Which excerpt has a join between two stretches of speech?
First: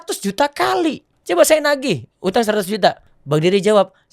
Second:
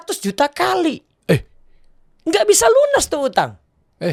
first; 2 cuts; at 1.1 s, 3.1 s

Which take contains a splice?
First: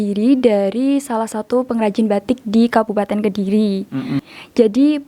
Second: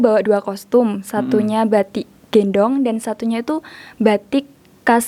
first; 1 cut; at 4.2 s

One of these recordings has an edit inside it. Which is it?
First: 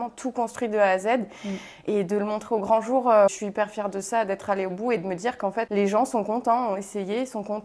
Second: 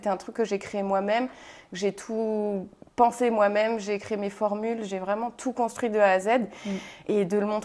first; 2 cuts; at 3.4 s, 5.7 s

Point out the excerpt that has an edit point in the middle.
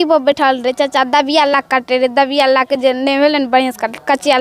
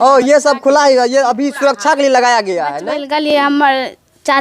second; 1 cut; at 2.8 s

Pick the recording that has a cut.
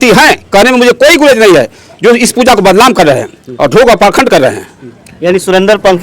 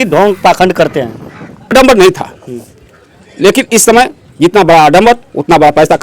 second; 1 cut; at 1.7 s

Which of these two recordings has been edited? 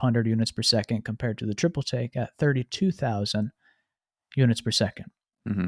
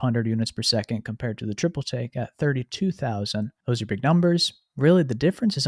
second; 1 cut; at 3.6 s

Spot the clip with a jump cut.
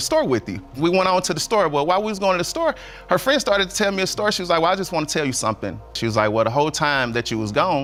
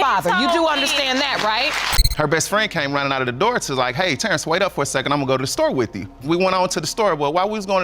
second; 1 cut; at 2.0 s

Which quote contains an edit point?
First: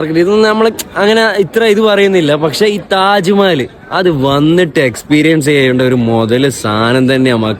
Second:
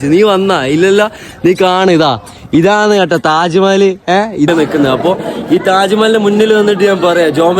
second; 1 cut; at 4.5 s

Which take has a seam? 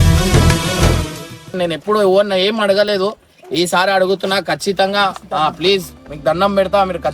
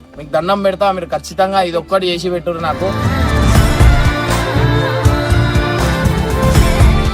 first; 1 cut; at 1.5 s

